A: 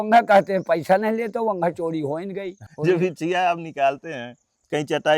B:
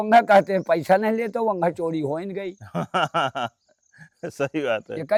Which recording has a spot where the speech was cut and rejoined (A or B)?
A